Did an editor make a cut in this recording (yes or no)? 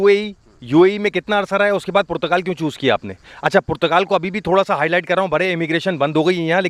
no